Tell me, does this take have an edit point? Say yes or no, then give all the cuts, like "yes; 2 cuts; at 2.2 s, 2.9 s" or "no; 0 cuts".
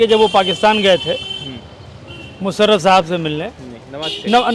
no; 0 cuts